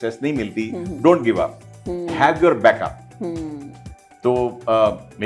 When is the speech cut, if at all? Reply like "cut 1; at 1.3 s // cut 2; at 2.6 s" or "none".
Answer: none